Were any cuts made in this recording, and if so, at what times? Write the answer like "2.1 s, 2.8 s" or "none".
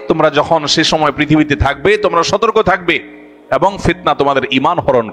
none